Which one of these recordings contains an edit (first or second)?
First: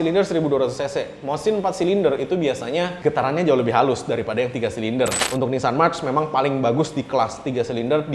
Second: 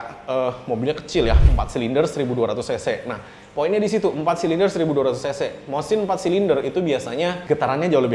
first